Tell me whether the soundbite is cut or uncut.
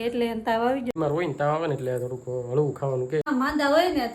cut